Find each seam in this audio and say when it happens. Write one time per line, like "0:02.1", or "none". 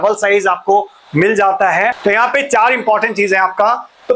0:02.0